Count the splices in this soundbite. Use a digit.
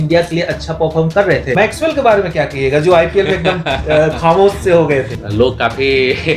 2